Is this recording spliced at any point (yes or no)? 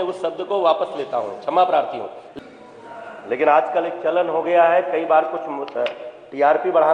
yes